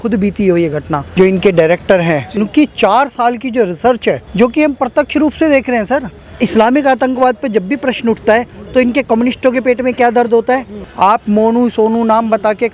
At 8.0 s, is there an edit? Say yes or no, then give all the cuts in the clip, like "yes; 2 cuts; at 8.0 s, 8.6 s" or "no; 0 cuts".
no; 5 cuts; at 1.0 s, 2.3 s, 4.3 s, 6.4 s, 10.8 s